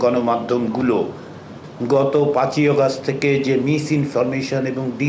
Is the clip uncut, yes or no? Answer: yes